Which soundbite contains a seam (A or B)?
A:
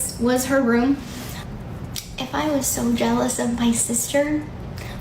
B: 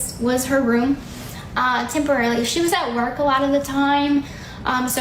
A